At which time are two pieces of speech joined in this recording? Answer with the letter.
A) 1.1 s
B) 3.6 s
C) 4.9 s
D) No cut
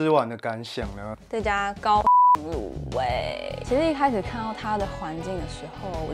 D